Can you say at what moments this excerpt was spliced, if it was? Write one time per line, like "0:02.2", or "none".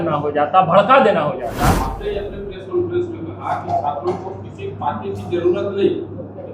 0:01.9